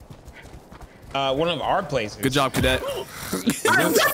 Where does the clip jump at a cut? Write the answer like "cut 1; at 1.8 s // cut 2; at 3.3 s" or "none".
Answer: none